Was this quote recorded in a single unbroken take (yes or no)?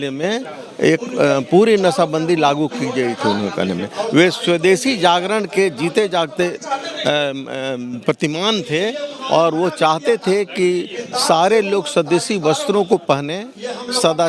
yes